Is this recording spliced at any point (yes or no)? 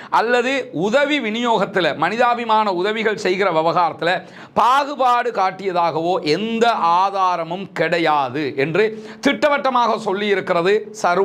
no